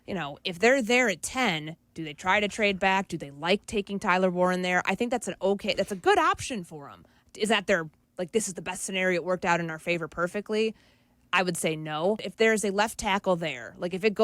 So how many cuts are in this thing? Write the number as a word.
one